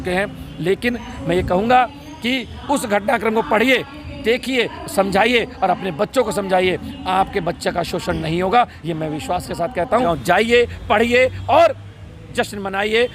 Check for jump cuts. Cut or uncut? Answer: cut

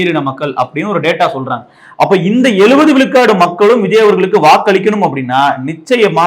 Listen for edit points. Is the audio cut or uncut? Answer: uncut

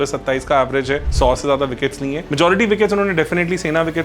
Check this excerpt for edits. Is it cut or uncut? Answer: cut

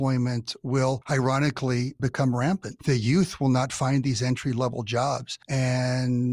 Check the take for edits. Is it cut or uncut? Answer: cut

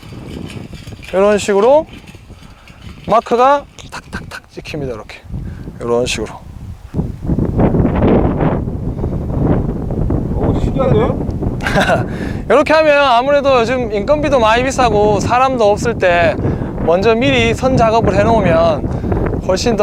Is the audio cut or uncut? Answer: uncut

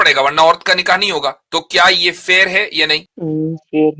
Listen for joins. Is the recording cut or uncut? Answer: cut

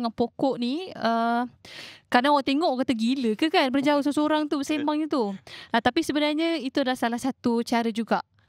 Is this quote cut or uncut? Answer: uncut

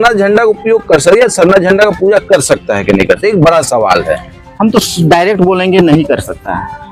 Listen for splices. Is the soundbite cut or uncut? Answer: uncut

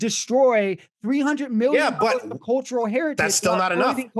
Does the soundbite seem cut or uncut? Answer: uncut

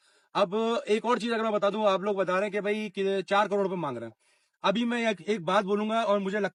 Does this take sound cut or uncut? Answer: uncut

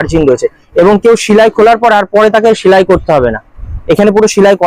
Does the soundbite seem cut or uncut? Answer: uncut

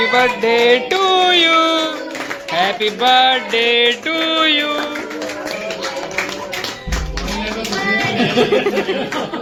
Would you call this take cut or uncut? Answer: uncut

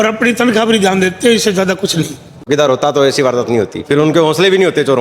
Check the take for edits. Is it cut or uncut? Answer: cut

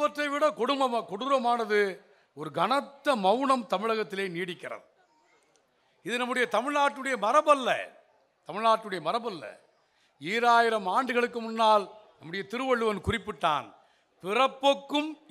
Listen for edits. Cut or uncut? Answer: uncut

